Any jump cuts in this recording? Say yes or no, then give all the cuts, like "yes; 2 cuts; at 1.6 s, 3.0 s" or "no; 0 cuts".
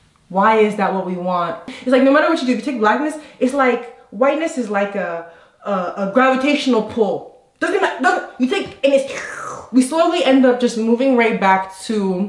yes; 1 cut; at 1.7 s